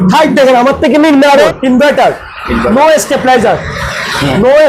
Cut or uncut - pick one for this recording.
cut